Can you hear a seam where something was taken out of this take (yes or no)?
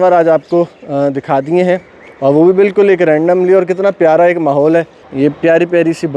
yes